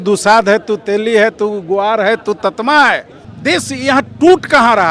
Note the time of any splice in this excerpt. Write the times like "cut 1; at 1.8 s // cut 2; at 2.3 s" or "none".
none